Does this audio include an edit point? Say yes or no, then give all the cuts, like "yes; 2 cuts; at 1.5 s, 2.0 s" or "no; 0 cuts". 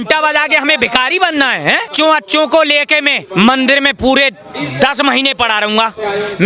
yes; 1 cut; at 1.9 s